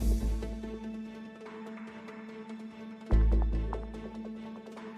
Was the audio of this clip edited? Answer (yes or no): yes